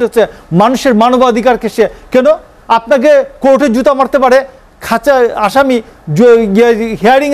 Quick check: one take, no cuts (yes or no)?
yes